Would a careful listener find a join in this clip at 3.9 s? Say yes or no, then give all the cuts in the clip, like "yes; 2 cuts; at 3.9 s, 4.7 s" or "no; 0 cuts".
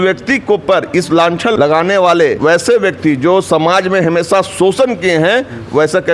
no; 2 cuts; at 1.5 s, 2.4 s